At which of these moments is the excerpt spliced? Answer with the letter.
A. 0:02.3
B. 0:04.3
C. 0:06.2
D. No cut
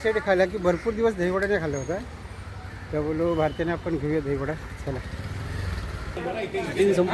C